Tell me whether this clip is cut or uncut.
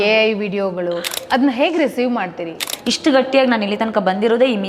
cut